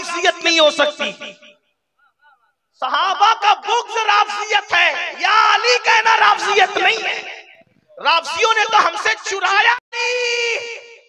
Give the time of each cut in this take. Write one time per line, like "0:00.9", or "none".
0:09.8